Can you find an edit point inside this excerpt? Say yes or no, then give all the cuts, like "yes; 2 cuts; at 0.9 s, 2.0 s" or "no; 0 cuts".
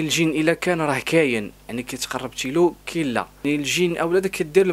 yes; 1 cut; at 3.3 s